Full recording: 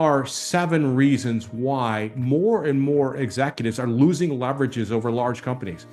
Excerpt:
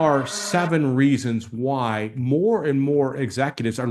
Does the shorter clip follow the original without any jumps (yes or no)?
yes